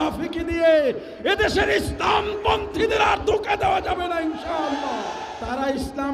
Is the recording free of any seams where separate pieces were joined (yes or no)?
no